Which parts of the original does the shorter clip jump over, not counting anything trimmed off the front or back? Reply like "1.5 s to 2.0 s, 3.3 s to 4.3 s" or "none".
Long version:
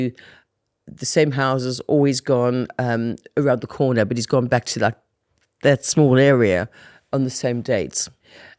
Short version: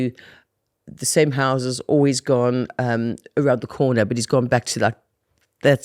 none